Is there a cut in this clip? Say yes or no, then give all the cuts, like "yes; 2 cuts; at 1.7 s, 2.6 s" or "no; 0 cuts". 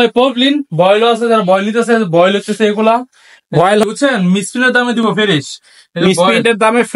yes; 1 cut; at 3.8 s